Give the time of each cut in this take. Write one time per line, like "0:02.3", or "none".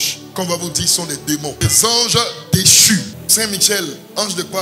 0:01.6
0:03.2